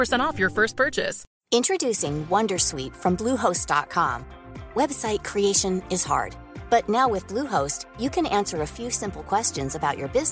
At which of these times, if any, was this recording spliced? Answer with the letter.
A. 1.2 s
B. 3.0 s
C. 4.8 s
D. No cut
A